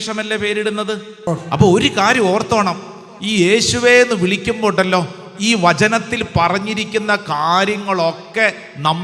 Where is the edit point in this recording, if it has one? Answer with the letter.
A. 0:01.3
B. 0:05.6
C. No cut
A